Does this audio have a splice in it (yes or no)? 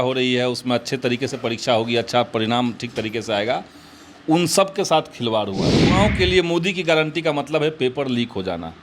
yes